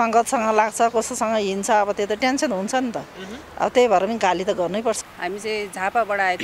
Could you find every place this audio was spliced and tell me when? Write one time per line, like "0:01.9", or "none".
0:05.1